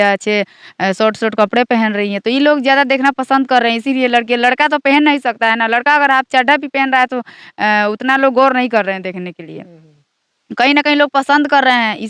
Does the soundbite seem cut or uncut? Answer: uncut